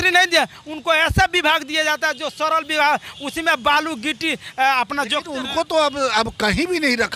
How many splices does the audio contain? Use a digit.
0